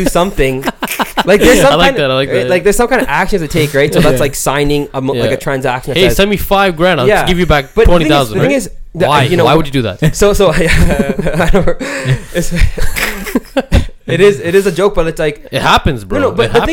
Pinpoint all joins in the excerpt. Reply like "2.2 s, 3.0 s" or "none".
none